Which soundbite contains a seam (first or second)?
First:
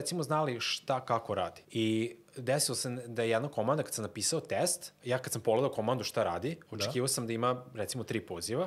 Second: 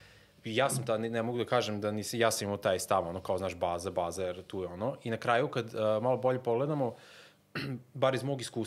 first